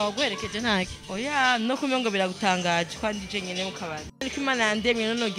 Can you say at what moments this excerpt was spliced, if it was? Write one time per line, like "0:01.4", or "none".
0:04.2